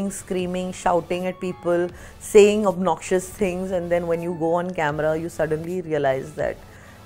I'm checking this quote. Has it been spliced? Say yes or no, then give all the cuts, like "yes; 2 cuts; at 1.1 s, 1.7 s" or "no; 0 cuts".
no; 0 cuts